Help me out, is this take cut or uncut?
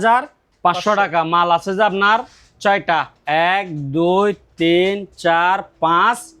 uncut